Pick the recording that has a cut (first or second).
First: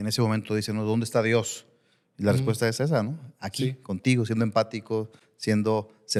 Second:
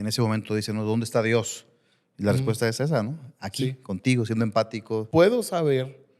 second